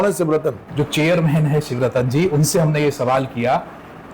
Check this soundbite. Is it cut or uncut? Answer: uncut